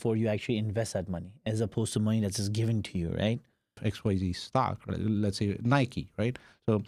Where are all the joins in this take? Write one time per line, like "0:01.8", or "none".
0:03.8